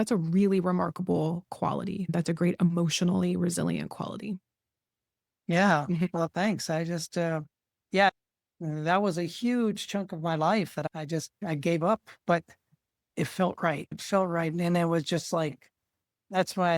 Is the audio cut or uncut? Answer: cut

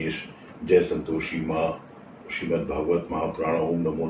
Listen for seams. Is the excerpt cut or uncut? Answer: uncut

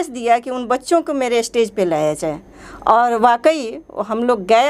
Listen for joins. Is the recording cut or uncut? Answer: uncut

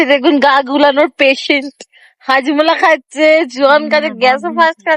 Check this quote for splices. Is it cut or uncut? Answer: cut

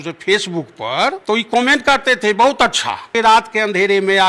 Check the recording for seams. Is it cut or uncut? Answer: cut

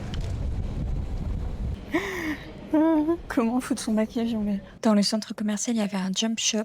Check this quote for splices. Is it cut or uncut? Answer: cut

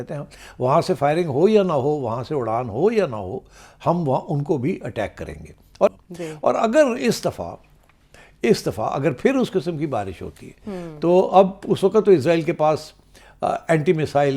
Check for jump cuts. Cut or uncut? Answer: cut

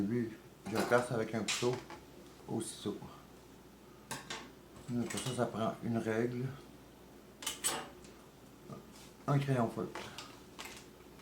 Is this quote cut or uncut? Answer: cut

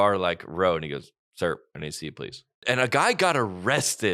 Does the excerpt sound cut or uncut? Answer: cut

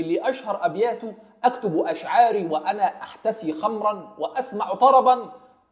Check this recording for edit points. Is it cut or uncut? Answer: uncut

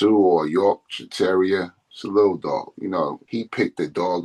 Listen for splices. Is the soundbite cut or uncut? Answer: cut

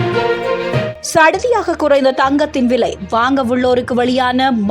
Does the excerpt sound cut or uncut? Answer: cut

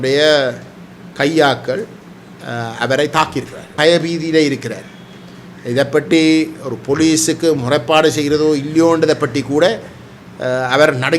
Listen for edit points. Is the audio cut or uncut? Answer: cut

